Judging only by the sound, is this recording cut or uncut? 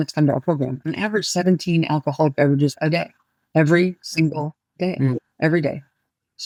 uncut